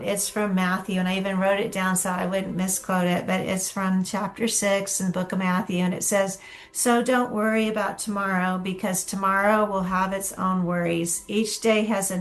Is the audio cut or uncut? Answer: uncut